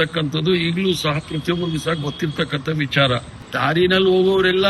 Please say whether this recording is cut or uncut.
cut